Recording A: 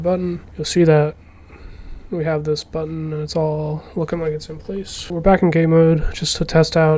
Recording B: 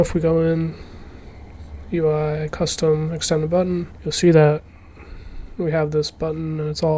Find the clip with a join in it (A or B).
A